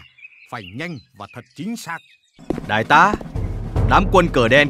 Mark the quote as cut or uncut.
cut